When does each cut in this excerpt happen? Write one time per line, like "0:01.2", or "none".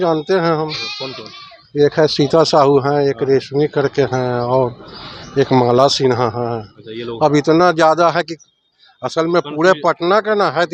none

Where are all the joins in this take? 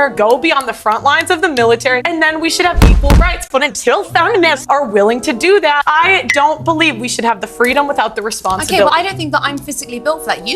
0:02.0

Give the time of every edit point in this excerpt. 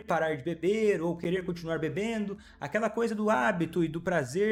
none

